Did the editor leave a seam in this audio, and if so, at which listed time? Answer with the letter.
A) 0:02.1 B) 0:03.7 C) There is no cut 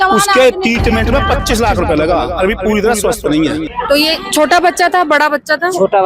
B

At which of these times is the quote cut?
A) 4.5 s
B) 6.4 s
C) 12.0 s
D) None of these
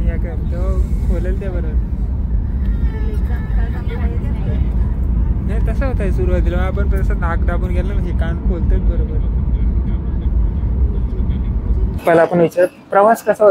C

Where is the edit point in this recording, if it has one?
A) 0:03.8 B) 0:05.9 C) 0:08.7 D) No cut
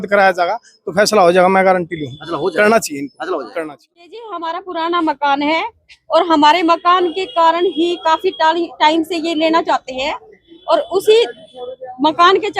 A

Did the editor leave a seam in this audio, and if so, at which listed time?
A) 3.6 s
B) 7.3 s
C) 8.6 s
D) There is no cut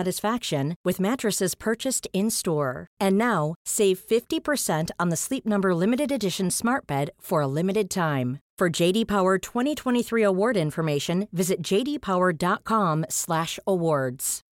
D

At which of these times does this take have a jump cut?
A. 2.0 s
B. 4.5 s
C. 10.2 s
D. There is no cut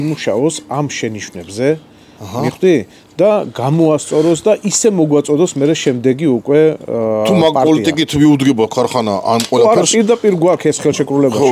D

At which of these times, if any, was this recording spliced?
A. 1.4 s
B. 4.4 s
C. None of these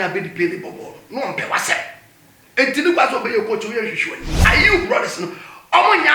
B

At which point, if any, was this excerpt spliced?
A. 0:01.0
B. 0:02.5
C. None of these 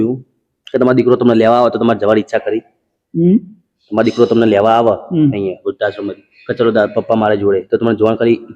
C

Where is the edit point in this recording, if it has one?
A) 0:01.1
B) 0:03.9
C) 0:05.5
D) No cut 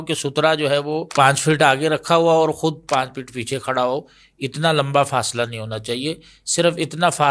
A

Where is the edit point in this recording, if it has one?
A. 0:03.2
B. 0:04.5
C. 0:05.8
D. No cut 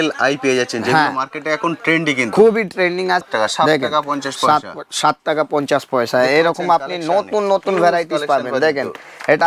A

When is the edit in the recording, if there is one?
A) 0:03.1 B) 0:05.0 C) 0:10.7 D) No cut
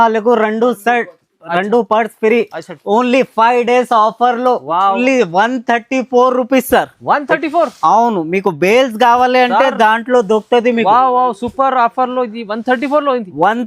B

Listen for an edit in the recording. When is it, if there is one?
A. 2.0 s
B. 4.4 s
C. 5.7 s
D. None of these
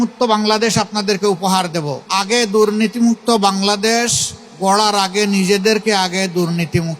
A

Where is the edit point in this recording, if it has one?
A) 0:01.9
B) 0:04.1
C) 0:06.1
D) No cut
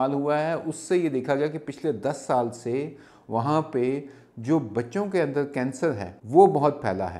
C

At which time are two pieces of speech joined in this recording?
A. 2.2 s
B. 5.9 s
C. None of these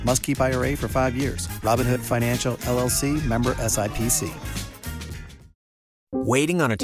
B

